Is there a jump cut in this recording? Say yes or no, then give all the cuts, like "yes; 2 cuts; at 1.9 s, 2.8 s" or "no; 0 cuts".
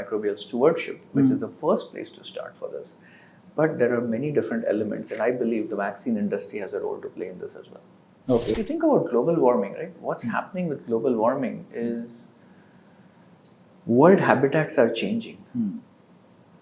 yes; 1 cut; at 8.5 s